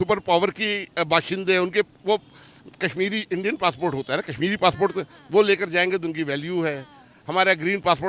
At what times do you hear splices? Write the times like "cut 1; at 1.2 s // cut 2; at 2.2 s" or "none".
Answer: none